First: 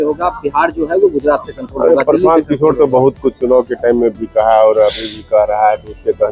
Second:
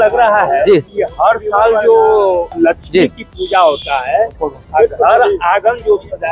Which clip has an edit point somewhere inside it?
second; 2 cuts; at 1.0 s, 2.5 s

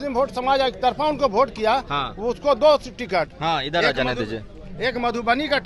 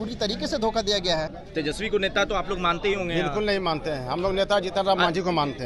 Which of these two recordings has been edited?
second; 1 cut; at 1.4 s

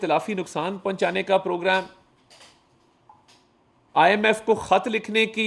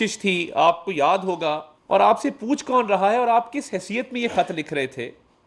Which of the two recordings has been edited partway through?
second; 1 cut; at 1.7 s

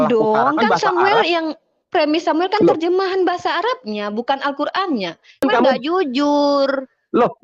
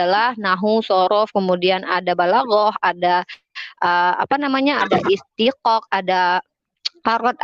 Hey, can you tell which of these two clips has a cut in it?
first; 1 cut; at 5.4 s

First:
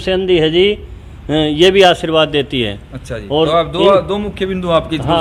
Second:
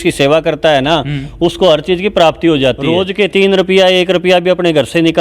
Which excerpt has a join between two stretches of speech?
second; 1 cut; at 2.9 s

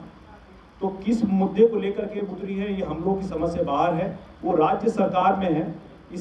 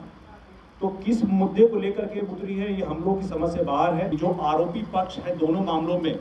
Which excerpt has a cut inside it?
second; 1 cut; at 4.1 s

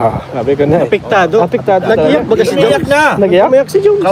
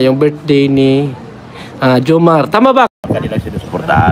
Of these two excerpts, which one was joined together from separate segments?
second; 1 cut; at 2.9 s

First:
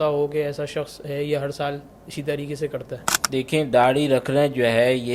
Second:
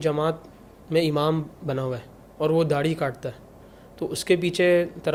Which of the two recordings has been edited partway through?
first; 1 cut; at 3.1 s

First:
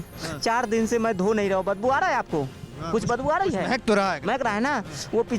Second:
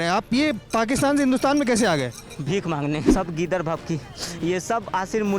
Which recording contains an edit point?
second; 1 cut; at 3.1 s

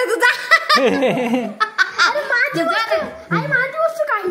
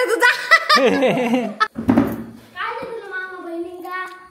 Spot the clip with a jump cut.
second; 1 cut; at 1.7 s

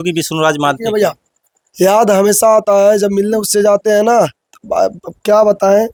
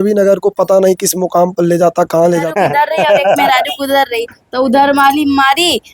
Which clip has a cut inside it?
second; 1 cut; at 2.5 s

